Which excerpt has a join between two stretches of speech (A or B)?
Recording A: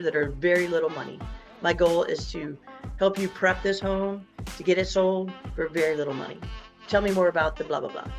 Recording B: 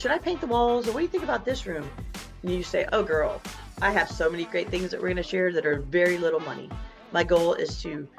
B